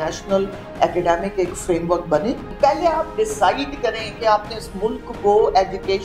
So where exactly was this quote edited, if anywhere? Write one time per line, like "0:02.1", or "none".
0:02.5